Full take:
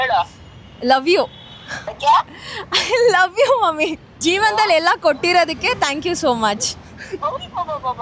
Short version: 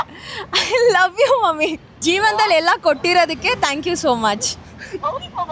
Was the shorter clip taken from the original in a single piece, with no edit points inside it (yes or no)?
yes